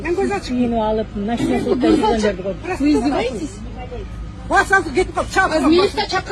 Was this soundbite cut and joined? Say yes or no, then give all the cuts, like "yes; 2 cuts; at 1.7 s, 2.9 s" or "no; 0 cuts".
no; 0 cuts